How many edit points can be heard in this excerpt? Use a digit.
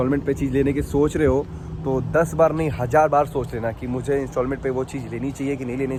0